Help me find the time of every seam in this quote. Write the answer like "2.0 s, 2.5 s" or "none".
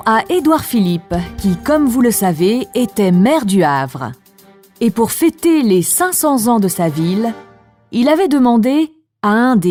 none